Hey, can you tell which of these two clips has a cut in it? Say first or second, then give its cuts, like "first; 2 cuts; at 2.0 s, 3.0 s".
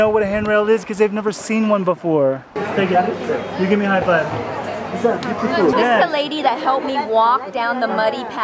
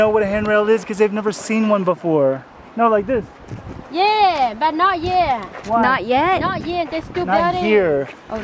first; 2 cuts; at 2.5 s, 5.7 s